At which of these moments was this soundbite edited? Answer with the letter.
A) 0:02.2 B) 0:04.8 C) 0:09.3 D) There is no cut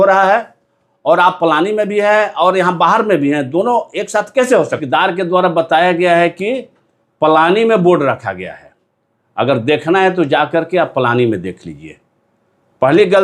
B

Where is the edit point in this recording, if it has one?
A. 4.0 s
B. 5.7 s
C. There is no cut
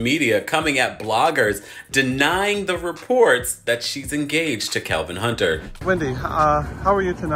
B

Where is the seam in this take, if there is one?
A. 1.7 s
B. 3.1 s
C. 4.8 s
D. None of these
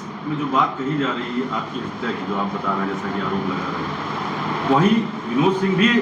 D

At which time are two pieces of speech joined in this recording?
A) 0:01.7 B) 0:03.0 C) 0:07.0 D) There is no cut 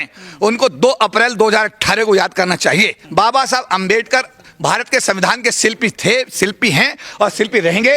B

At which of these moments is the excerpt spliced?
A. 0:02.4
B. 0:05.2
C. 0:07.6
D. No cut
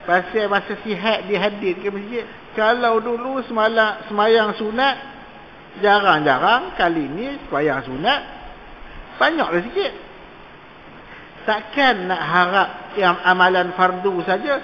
A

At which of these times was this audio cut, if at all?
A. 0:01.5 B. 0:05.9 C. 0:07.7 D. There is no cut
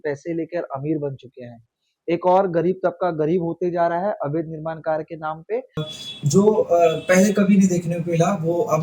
B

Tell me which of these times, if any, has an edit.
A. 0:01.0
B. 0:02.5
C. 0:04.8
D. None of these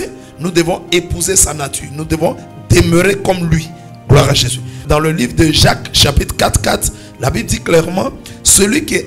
C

